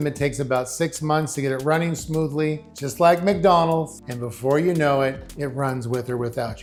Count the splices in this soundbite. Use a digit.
0